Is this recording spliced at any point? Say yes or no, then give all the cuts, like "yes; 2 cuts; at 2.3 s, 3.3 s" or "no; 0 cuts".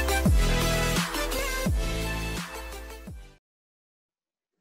yes; 1 cut; at 0.9 s